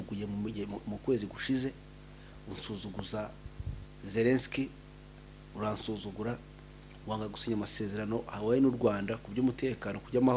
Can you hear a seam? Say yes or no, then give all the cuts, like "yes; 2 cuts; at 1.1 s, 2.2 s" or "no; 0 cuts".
no; 0 cuts